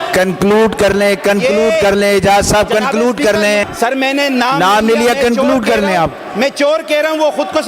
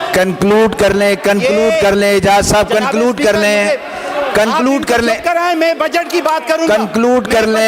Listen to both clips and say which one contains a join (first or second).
first